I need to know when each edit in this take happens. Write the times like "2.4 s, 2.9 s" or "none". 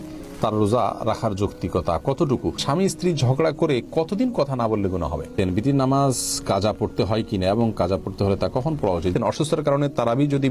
2.6 s, 5.3 s, 9.1 s